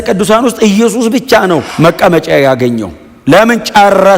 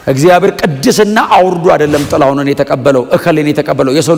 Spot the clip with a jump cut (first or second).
first